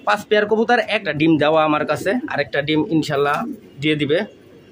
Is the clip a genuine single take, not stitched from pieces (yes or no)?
no